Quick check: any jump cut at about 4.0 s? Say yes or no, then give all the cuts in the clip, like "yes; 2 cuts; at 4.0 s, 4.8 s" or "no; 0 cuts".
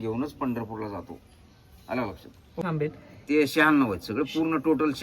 no; 1 cut; at 2.6 s